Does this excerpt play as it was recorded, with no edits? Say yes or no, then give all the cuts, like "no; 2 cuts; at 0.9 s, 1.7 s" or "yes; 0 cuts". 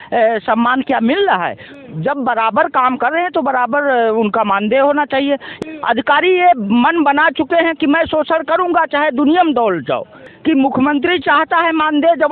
no; 2 cuts; at 5.5 s, 10.3 s